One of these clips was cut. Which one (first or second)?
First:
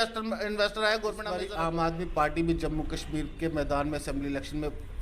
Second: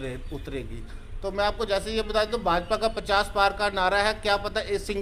first